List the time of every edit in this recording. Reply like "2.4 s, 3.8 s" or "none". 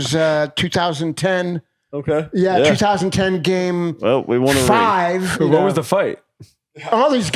5.3 s

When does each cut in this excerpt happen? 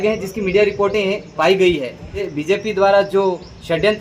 2.2 s

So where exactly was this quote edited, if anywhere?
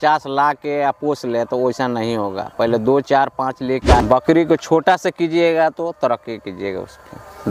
4.0 s

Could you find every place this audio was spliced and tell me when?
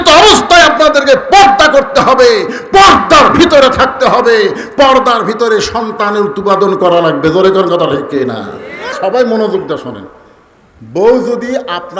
8.9 s

